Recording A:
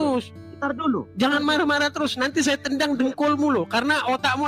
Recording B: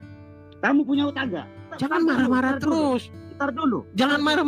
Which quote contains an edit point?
B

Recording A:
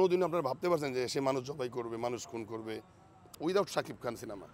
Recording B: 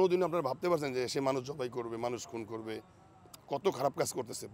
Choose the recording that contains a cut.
A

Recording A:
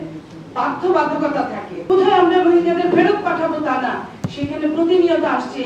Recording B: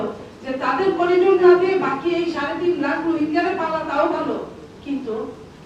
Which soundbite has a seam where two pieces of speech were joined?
A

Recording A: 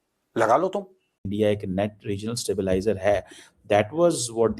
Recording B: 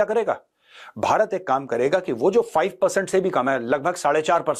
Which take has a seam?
A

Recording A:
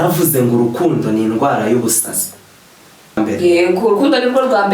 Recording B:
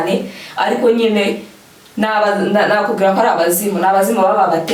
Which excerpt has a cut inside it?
A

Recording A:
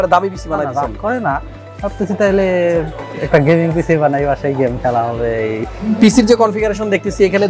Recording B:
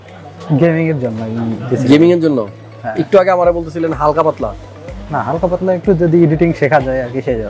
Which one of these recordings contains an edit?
A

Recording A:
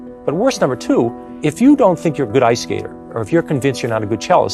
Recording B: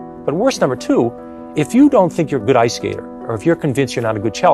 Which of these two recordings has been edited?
A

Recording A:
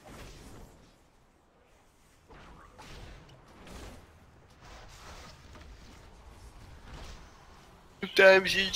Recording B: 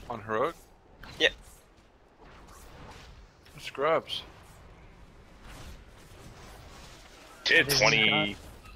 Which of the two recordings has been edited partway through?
A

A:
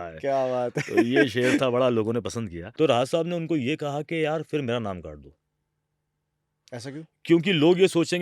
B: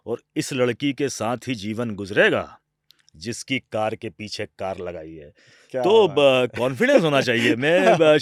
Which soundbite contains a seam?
A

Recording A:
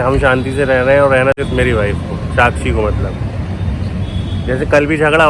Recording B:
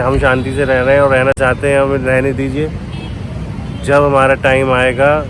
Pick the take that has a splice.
A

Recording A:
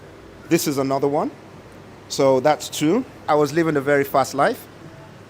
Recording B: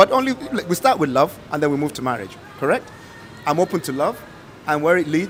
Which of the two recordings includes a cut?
A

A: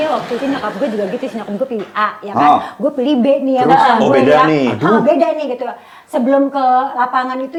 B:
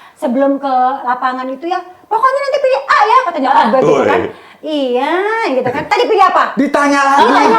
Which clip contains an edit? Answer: B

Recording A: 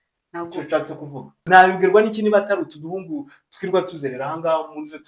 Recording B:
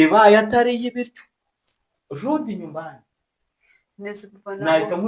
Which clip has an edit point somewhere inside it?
A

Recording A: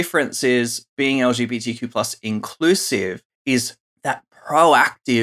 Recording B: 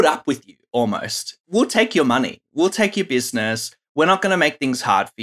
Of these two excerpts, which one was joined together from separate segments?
B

